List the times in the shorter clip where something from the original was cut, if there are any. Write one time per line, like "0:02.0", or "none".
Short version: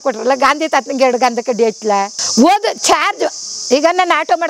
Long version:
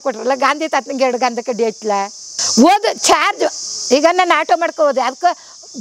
0:02.2